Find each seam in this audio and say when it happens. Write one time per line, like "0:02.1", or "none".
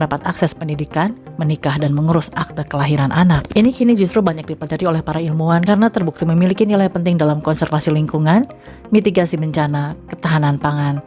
0:03.5